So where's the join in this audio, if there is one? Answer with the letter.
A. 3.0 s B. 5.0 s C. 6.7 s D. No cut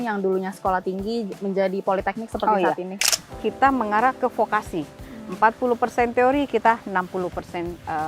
A